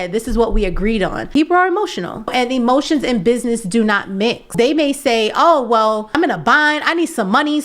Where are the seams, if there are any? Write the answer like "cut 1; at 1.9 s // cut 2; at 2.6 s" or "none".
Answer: cut 1; at 1.2 s // cut 2; at 2.3 s // cut 3; at 4.5 s // cut 4; at 6.1 s